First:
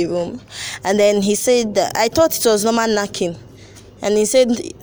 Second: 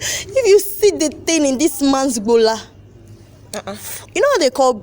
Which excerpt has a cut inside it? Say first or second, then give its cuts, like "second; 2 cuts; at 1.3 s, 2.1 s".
second; 1 cut; at 3.9 s